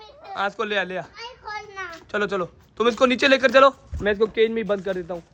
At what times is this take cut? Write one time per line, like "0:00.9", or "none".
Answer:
none